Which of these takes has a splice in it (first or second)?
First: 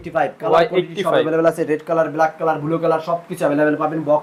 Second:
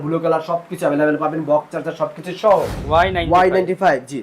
second